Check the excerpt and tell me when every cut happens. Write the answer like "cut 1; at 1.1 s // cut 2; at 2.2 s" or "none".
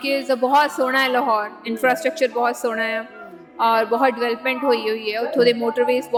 none